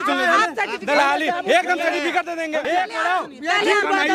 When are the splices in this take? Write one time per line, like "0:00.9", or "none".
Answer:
0:02.6